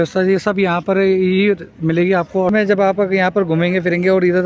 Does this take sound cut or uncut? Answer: cut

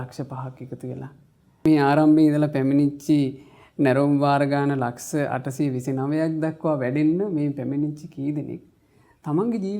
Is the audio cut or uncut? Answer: cut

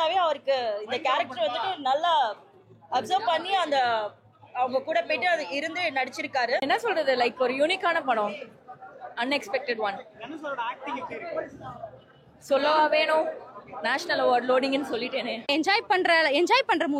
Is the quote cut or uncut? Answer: cut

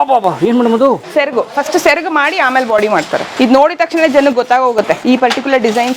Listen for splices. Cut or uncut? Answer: cut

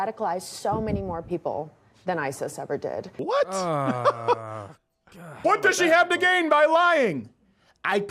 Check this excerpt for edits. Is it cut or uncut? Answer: cut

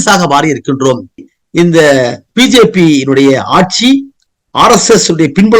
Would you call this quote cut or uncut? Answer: cut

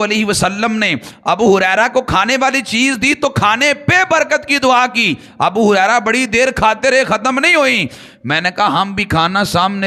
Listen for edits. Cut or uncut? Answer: uncut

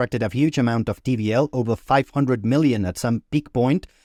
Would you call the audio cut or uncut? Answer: uncut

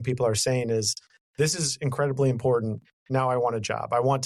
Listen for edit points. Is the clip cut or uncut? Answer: uncut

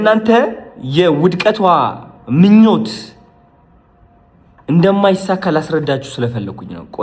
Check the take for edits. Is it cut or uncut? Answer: uncut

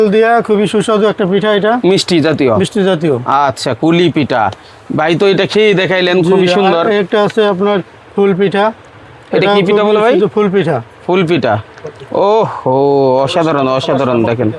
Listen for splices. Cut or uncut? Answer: uncut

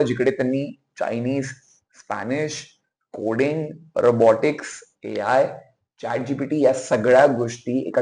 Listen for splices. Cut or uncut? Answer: uncut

